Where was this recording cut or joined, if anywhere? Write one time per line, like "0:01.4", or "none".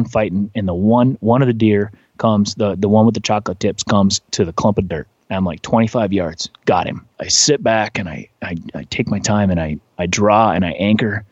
0:04.2
0:07.2